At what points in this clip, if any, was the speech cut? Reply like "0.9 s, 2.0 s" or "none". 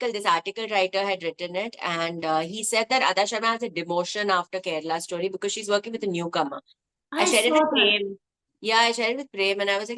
none